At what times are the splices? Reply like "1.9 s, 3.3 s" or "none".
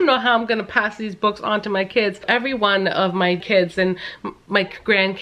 2.2 s, 3.4 s